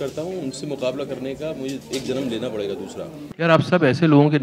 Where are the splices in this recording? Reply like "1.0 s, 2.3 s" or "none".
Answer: 3.2 s